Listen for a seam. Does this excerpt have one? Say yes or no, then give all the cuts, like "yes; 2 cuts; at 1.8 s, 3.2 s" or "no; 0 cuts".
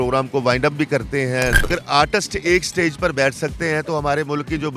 yes; 1 cut; at 1.7 s